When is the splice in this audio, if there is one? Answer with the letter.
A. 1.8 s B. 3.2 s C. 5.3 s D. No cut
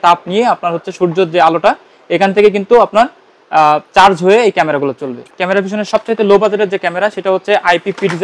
C